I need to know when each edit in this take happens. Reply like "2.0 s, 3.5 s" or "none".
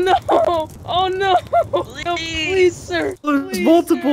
2.0 s, 3.2 s